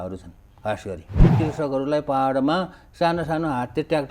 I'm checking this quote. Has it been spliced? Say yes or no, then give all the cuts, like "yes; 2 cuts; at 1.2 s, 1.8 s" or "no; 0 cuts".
yes; 1 cut; at 1.3 s